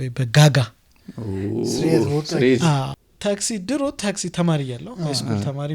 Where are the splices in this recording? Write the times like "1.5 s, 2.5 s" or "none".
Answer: 3.0 s